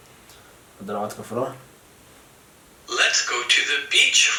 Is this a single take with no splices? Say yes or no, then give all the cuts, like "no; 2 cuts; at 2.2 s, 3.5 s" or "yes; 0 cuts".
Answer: yes; 0 cuts